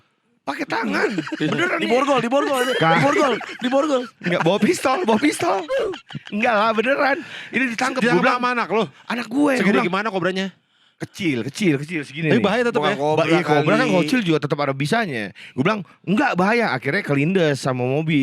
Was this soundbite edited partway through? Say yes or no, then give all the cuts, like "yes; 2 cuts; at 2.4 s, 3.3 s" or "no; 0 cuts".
no; 0 cuts